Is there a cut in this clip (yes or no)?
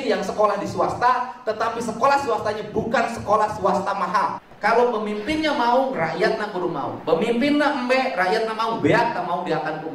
yes